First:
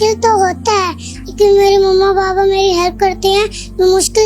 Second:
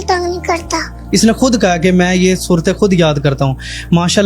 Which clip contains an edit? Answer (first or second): second